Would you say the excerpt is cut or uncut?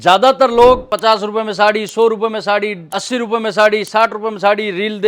cut